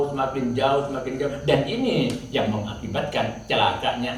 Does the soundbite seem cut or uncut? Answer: uncut